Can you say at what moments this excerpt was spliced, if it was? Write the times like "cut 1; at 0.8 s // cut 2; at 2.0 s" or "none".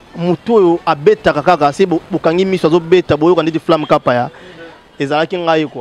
none